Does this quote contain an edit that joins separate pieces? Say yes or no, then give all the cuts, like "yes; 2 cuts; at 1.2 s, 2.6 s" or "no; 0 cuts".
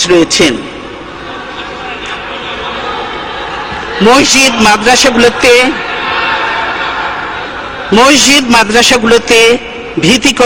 no; 0 cuts